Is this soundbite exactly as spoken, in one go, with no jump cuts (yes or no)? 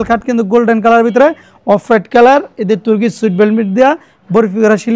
yes